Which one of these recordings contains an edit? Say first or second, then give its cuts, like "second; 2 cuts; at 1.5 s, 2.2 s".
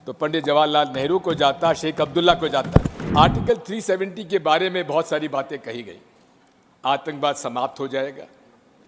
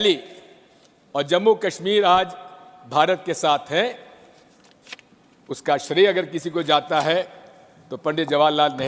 first; 1 cut; at 3.0 s